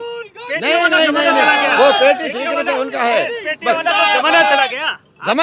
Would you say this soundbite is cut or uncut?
uncut